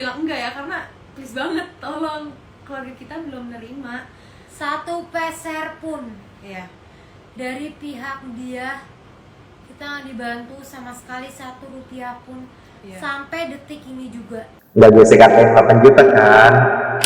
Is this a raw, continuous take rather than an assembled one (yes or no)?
yes